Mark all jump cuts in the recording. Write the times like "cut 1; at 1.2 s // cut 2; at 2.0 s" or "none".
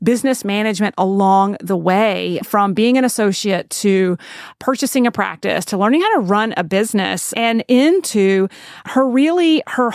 cut 1; at 2.4 s // cut 2; at 4.6 s // cut 3; at 7.3 s // cut 4; at 8.8 s